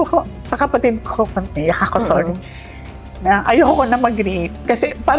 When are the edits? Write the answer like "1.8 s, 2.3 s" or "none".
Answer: none